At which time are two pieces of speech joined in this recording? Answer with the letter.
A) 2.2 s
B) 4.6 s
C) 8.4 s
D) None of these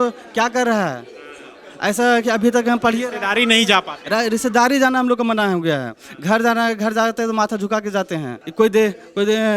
C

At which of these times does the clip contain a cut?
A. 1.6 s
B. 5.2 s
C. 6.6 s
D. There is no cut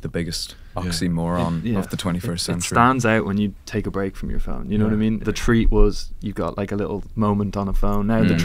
B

